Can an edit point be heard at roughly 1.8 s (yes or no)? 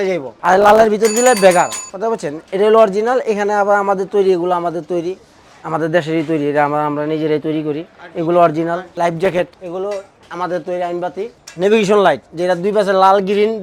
no